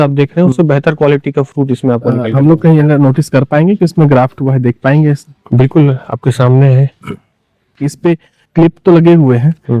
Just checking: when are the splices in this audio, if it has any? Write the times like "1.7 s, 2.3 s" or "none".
none